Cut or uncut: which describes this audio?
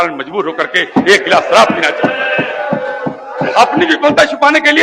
uncut